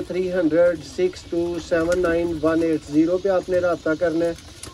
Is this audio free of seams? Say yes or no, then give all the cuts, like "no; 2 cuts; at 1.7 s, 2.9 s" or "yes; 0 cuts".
yes; 0 cuts